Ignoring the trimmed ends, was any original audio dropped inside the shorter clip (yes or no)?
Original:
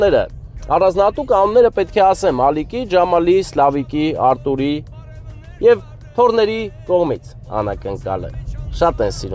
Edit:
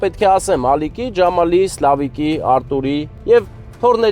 yes